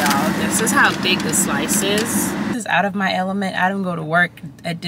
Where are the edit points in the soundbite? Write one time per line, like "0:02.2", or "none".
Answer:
0:02.5